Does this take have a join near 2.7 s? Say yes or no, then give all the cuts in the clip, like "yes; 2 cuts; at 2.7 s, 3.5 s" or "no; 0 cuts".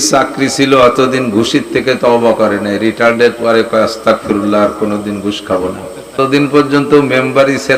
no; 1 cut; at 6.2 s